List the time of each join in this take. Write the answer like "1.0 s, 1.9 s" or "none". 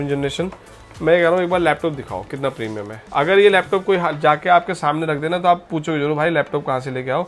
none